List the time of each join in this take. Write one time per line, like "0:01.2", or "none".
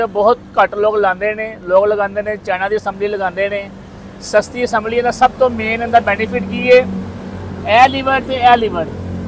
none